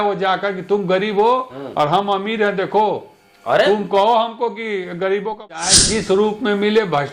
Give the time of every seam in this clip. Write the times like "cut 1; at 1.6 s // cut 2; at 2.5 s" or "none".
cut 1; at 5.7 s